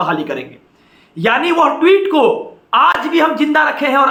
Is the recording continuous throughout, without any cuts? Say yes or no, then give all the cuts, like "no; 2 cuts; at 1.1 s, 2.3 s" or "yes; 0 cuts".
yes; 0 cuts